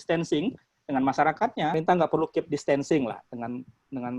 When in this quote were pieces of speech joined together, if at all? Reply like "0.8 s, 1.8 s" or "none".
1.7 s